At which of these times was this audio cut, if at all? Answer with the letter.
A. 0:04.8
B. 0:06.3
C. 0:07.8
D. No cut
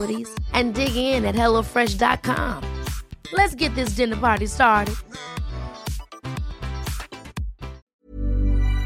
C